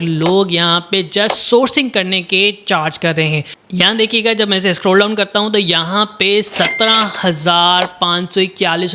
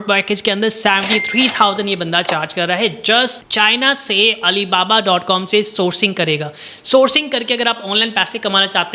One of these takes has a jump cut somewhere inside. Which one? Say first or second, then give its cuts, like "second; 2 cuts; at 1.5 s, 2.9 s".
first; 1 cut; at 3.6 s